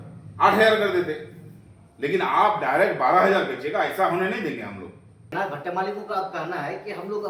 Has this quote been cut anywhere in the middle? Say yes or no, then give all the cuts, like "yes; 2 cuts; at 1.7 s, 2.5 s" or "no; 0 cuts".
yes; 1 cut; at 5.3 s